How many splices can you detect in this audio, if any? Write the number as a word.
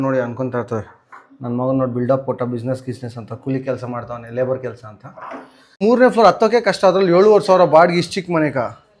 one